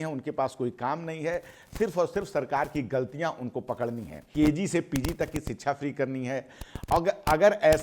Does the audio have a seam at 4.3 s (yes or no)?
yes